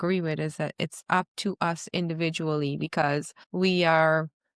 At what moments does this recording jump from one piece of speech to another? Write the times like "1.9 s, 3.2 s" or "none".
3.4 s